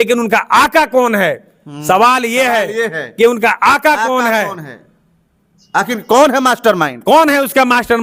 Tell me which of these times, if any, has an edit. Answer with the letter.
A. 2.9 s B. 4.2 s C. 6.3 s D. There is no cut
D